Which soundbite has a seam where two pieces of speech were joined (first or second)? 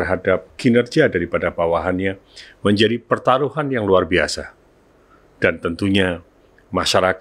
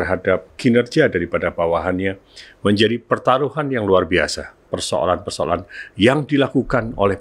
second